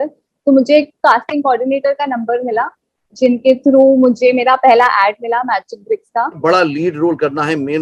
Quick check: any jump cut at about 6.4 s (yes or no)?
yes